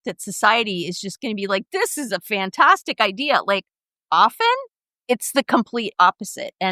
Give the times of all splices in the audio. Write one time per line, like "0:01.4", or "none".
none